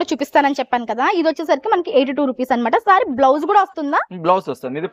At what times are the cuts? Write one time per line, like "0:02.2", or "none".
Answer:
none